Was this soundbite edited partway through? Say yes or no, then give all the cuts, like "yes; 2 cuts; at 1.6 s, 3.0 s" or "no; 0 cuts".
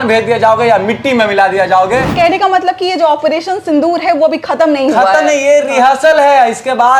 yes; 1 cut; at 2.1 s